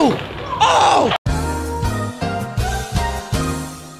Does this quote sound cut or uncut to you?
uncut